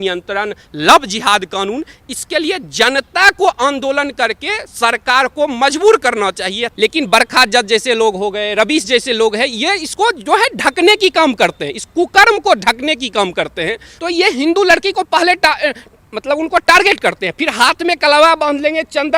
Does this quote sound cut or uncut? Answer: cut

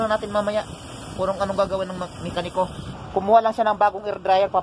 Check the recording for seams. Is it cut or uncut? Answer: cut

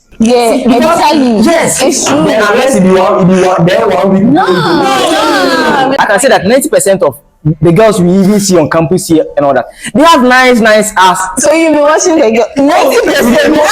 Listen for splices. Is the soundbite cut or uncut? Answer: cut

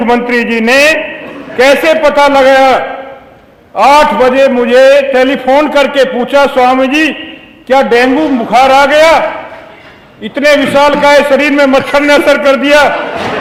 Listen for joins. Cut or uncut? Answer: uncut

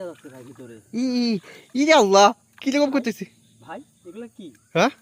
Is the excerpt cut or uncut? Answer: uncut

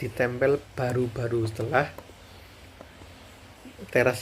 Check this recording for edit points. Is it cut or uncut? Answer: uncut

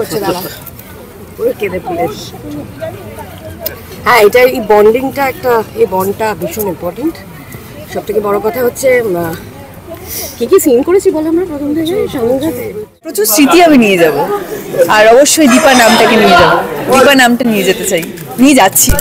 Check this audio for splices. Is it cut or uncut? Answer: cut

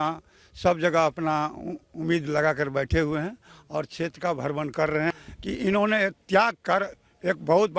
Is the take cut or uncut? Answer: cut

